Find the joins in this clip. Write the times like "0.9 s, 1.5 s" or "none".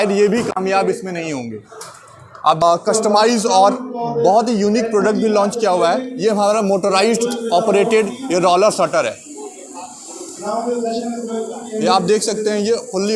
2.6 s